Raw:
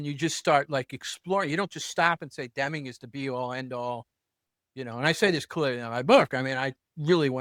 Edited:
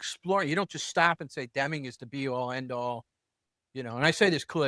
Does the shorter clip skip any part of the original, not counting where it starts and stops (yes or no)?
no